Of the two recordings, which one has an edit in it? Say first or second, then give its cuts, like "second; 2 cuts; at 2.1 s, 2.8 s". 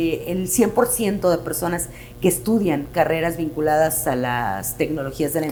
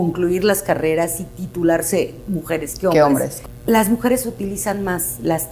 second; 1 cut; at 3.4 s